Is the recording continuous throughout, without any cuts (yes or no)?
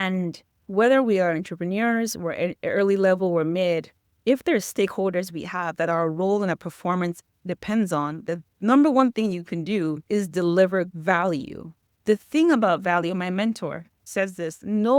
no